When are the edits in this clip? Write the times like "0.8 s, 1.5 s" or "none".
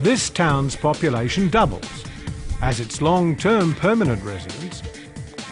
2.4 s